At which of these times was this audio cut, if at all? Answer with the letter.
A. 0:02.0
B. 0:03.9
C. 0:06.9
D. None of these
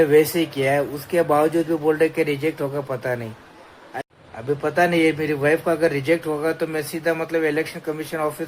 B